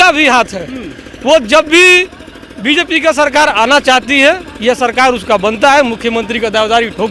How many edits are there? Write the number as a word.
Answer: zero